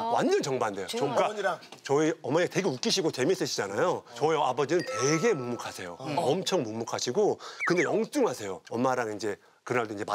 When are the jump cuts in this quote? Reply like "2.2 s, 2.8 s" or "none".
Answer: 8.6 s